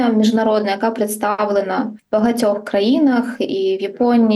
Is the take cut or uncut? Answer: cut